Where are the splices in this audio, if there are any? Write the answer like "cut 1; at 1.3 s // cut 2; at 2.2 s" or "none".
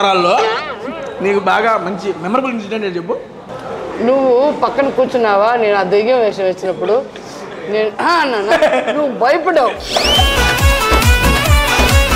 none